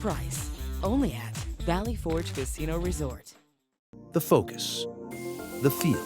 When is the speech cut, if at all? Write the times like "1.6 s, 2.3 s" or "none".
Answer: 3.8 s